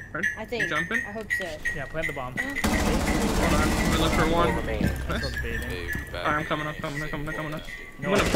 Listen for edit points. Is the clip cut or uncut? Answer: uncut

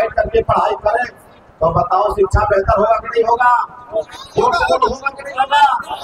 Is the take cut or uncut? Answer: uncut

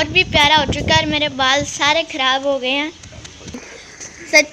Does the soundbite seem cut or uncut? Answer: cut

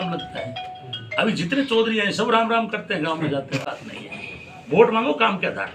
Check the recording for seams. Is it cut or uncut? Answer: cut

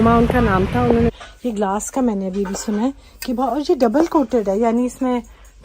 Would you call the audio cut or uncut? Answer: cut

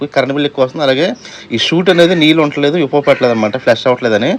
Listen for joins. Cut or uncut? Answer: uncut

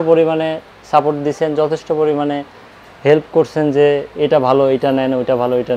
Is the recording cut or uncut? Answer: uncut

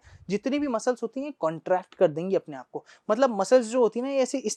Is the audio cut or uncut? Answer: uncut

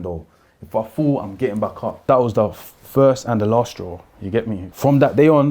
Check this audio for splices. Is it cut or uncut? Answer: cut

